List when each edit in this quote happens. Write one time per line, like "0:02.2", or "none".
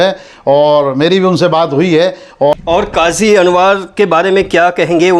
0:02.6